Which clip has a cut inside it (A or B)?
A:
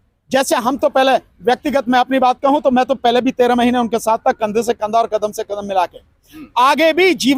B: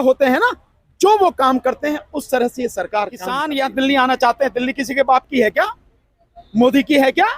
B